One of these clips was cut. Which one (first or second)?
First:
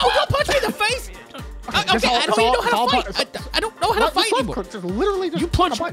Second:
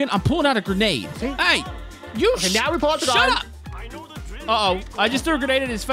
second